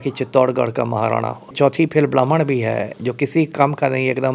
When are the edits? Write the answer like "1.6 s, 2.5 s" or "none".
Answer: 1.5 s